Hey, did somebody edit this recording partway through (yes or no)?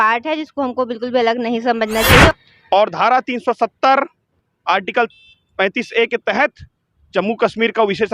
yes